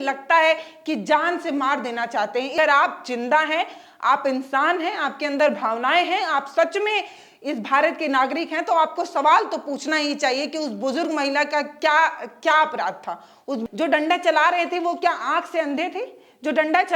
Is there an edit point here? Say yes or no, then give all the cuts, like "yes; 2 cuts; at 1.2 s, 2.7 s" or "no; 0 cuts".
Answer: yes; 2 cuts; at 2.5 s, 13.6 s